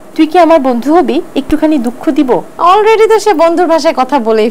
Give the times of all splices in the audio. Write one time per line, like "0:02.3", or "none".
0:02.5